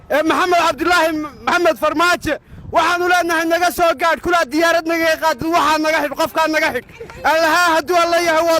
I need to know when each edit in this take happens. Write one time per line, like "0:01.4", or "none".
0:01.5